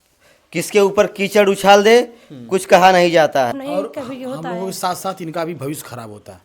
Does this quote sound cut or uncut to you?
cut